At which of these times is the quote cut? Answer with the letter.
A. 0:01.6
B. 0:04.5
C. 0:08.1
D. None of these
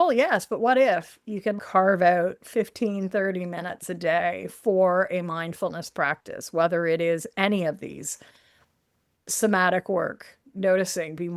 A